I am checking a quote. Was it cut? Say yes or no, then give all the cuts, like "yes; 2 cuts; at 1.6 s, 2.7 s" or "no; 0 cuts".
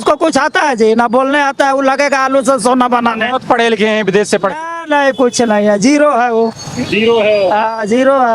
no; 0 cuts